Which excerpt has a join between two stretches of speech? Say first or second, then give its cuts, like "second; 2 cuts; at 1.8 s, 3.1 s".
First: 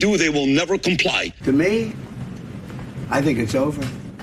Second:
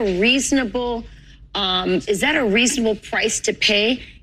first; 1 cut; at 1.3 s